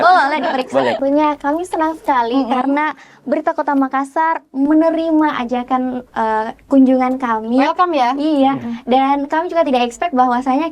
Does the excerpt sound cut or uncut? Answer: cut